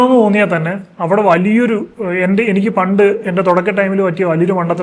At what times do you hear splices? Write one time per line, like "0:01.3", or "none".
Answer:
none